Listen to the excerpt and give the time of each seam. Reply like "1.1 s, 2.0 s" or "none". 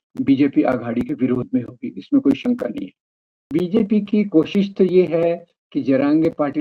3.5 s